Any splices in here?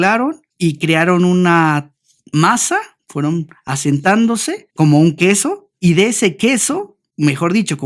yes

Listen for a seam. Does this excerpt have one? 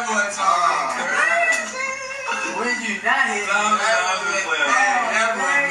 no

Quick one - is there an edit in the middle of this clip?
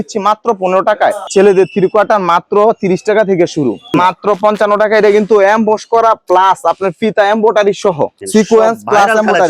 yes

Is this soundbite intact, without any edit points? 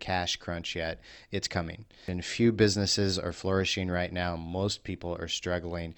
no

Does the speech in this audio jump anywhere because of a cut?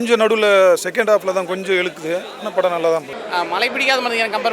yes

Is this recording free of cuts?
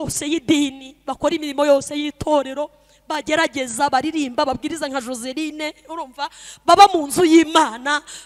yes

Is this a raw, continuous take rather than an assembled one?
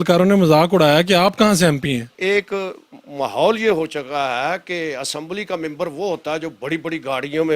yes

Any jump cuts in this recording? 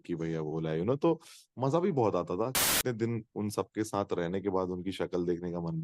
yes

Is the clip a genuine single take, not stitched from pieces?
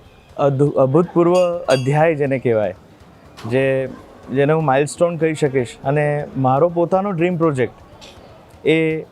yes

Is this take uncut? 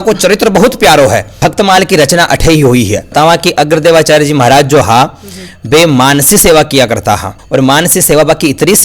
no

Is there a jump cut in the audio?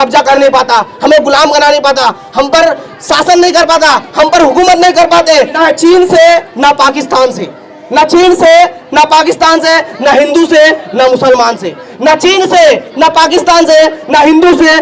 yes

